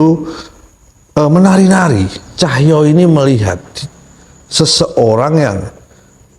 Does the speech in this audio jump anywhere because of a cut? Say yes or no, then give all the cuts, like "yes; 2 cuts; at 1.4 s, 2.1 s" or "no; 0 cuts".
yes; 1 cut; at 2.2 s